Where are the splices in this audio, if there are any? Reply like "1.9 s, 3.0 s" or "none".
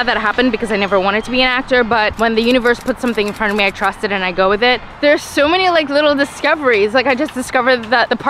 2.1 s, 4.9 s

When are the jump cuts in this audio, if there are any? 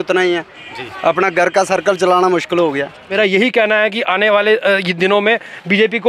3.0 s

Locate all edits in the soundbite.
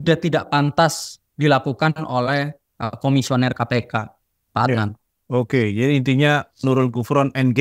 none

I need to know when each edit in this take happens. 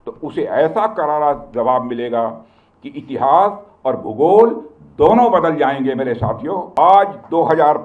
6.7 s

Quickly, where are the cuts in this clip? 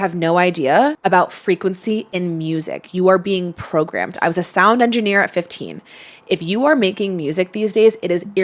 1.0 s

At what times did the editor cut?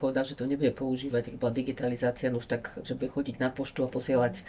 none

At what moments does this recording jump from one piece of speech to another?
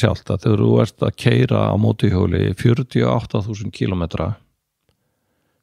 none

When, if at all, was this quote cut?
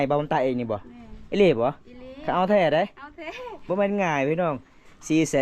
3.7 s

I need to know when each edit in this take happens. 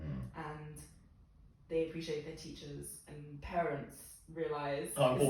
none

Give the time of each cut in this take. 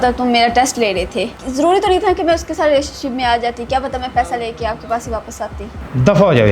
1.4 s

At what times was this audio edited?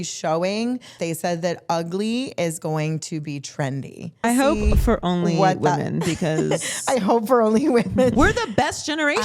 1.0 s, 4.2 s, 8.1 s

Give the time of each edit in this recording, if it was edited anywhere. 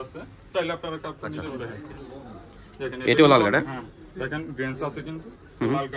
1.4 s

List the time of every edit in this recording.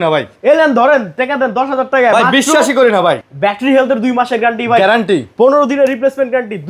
3.2 s

